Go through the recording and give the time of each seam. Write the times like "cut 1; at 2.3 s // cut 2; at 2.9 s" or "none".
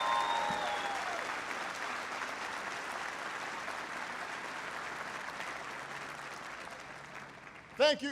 cut 1; at 1.1 s

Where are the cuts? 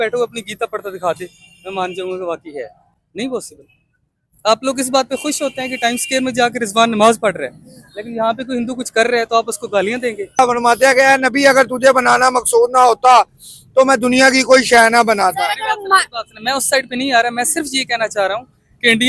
cut 1; at 10.4 s

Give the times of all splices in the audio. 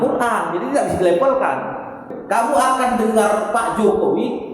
cut 1; at 2.1 s

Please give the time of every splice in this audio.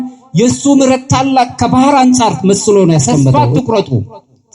cut 1; at 3.3 s

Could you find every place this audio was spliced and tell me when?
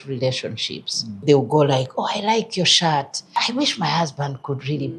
cut 1; at 1.2 s // cut 2; at 3.2 s

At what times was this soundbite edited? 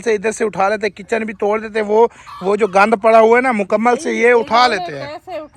none

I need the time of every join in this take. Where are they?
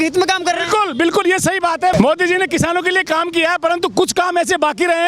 cut 1; at 1.9 s

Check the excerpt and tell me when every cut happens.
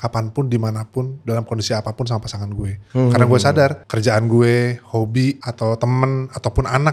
cut 1; at 2.7 s // cut 2; at 3.9 s // cut 3; at 5.5 s

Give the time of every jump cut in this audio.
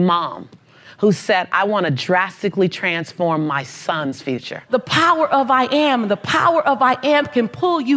cut 1; at 4.6 s

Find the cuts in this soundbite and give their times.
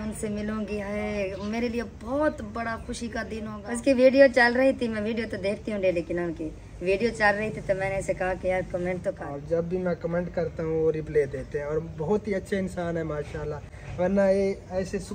cut 1; at 3.5 s // cut 2; at 9.3 s

